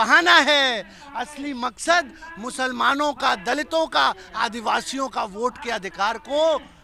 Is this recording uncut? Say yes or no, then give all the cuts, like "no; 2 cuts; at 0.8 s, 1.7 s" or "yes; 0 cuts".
yes; 0 cuts